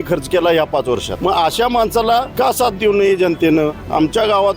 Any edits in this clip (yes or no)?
yes